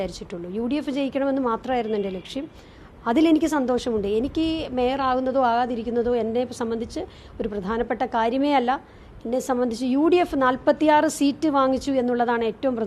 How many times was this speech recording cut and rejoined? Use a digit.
0